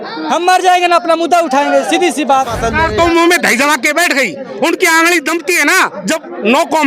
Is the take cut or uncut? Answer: cut